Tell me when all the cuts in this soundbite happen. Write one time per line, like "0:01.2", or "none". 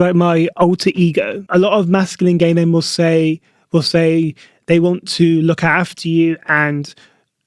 0:01.4